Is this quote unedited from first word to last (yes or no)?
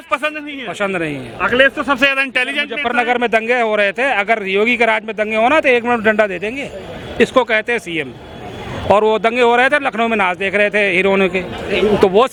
yes